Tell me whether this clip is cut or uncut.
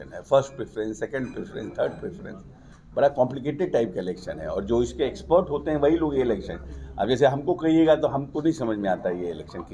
uncut